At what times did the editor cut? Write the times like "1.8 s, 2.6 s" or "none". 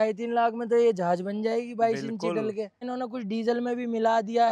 2.8 s